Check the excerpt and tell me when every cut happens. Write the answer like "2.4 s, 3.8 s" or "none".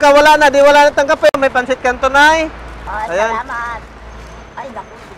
1.3 s